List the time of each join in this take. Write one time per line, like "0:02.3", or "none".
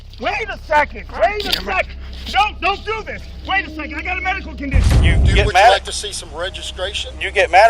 0:04.9